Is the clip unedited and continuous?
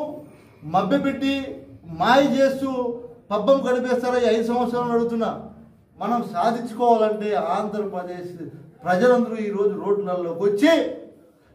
no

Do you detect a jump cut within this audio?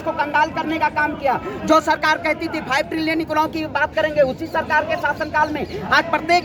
no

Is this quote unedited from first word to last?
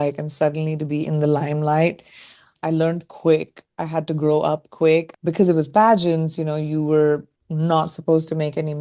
no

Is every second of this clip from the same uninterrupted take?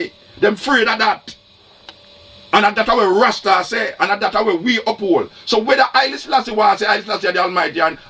yes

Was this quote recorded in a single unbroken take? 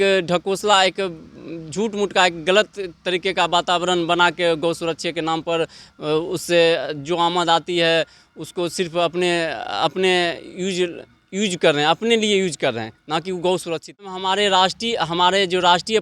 no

